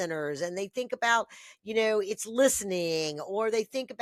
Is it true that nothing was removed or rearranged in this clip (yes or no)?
yes